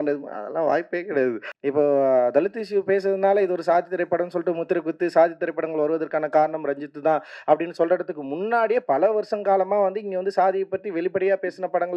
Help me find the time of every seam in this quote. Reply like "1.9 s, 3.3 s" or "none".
1.5 s